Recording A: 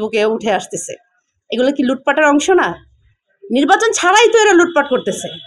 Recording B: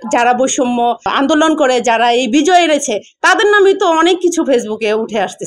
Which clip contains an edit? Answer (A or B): B